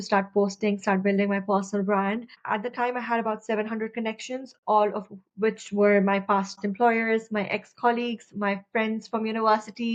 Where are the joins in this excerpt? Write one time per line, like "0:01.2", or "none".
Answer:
none